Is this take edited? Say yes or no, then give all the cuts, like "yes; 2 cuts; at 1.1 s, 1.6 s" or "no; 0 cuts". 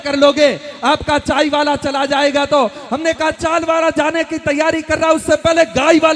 no; 0 cuts